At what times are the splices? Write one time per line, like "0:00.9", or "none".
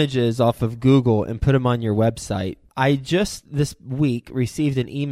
0:02.6